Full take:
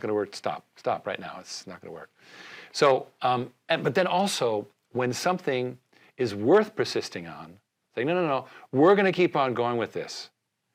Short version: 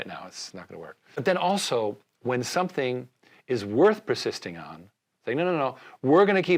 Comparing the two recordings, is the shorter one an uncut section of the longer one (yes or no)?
no